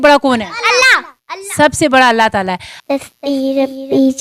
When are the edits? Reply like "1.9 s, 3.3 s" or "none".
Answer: 2.7 s